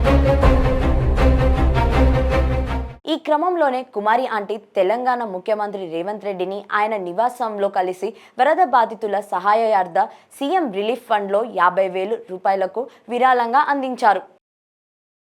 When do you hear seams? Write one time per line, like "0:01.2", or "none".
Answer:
none